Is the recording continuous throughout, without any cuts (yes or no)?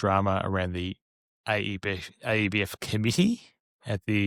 yes